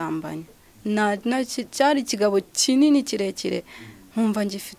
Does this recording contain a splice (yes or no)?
no